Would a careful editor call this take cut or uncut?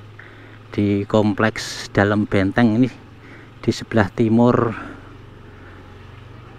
uncut